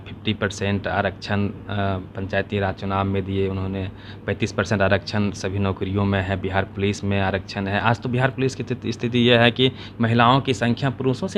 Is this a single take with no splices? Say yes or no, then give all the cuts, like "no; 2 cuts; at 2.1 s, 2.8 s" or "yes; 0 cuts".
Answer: yes; 0 cuts